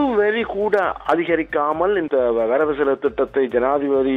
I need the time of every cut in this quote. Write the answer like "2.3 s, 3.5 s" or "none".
2.1 s